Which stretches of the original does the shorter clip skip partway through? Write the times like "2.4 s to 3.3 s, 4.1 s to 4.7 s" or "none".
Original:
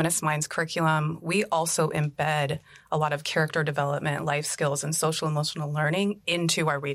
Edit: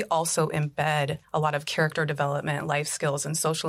2.6 s to 2.8 s